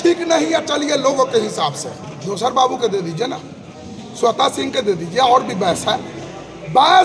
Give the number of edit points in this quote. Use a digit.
0